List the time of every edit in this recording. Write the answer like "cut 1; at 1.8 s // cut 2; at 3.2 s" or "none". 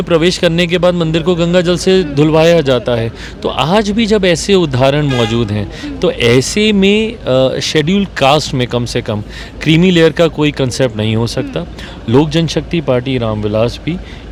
none